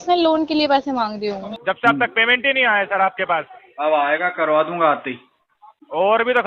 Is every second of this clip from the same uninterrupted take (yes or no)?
no